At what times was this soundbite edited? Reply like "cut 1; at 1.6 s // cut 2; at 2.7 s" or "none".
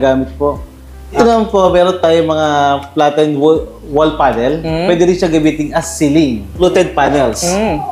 cut 1; at 1.2 s // cut 2; at 6.5 s